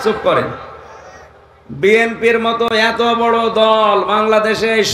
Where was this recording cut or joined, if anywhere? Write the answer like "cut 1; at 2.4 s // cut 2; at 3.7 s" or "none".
cut 1; at 2.7 s